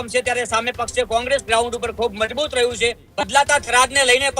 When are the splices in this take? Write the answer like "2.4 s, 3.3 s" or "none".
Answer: 3.1 s